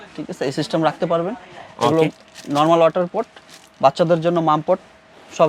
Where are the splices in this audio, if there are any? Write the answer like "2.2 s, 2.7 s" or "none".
none